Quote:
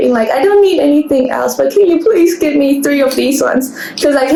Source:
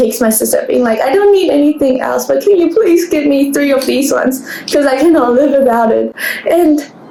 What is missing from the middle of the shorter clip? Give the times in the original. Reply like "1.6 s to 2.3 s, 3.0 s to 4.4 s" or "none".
none